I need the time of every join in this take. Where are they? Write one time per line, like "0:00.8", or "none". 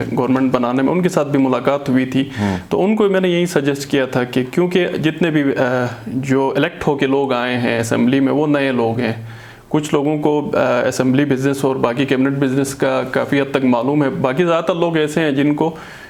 none